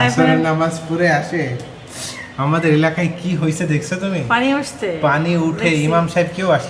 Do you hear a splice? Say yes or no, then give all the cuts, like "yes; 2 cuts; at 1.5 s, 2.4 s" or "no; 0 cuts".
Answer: no; 0 cuts